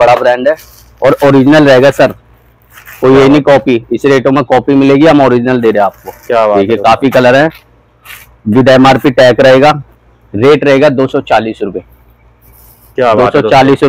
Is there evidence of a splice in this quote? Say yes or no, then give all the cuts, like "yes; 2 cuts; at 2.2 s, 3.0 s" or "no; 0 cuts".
no; 0 cuts